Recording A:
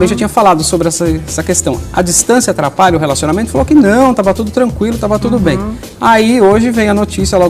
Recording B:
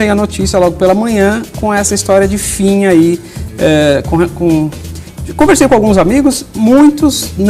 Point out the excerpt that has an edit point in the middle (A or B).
A